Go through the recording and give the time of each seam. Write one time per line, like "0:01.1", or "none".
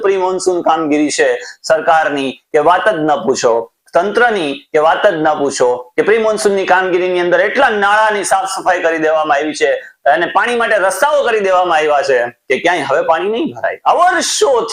none